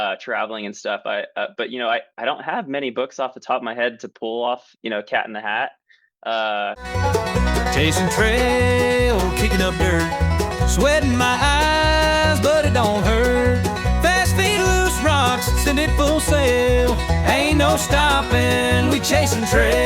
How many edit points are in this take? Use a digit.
1